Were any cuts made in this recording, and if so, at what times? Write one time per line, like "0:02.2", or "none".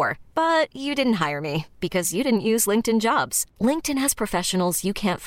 none

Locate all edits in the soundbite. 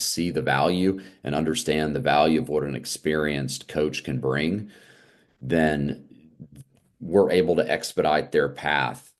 none

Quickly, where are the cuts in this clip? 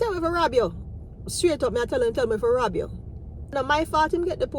0:03.5

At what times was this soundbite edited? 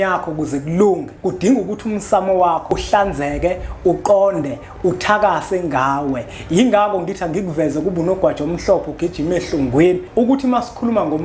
0:01.1
0:02.7
0:10.0

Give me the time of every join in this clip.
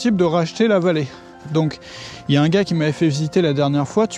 none

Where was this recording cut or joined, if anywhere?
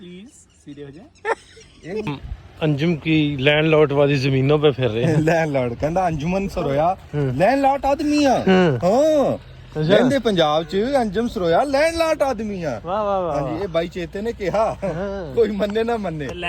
0:02.1

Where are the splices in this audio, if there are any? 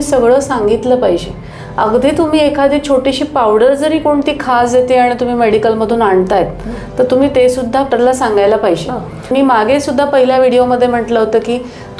0:07.9
0:09.3

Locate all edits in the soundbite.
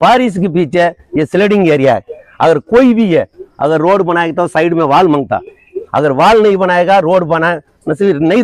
none

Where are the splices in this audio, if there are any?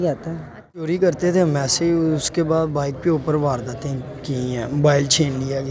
0:00.9

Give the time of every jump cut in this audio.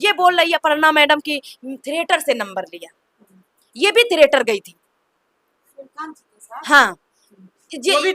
none

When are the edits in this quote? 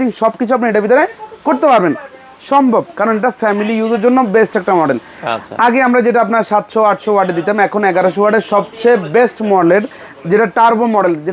none

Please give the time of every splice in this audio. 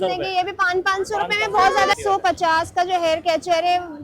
0:02.0

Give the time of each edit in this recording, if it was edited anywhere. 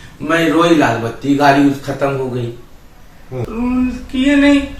0:03.5

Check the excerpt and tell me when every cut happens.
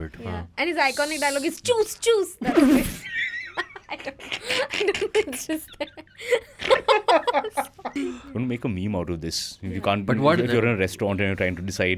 0:07.9

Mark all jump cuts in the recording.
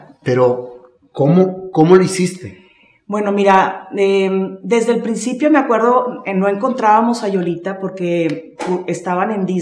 none

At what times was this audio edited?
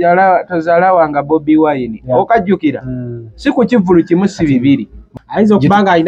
0:05.1

